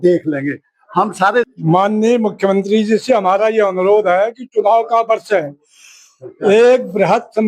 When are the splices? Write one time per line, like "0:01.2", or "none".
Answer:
none